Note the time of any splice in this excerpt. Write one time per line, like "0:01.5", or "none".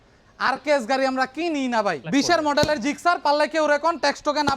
0:02.0